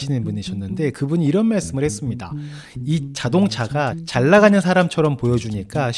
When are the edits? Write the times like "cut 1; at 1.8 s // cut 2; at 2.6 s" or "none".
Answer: cut 1; at 4.0 s

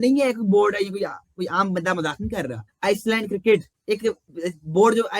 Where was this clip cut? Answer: cut 1; at 2.6 s

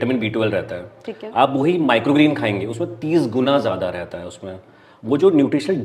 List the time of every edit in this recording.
none

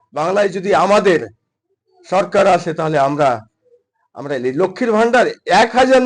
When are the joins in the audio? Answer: none

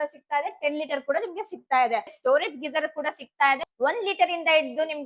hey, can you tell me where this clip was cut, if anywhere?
cut 1; at 2.2 s // cut 2; at 3.6 s

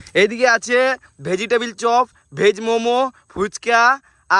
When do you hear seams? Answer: none

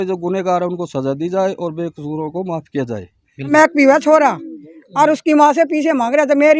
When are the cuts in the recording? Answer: cut 1; at 3.5 s

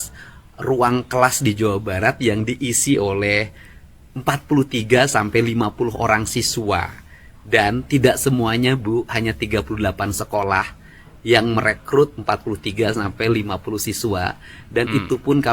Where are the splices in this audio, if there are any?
none

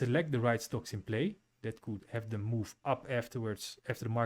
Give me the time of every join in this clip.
cut 1; at 2.0 s

